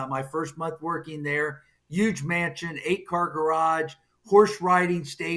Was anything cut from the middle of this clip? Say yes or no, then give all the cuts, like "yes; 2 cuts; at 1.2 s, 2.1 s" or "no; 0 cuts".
no; 0 cuts